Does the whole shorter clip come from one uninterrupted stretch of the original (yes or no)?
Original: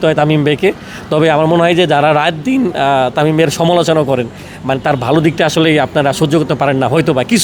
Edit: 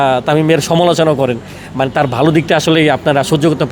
yes